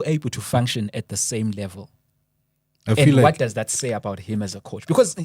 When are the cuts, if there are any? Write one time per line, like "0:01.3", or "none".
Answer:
none